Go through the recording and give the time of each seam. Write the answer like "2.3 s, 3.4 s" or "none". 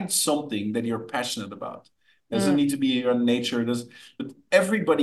4.1 s